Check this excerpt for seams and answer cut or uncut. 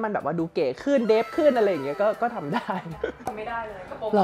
uncut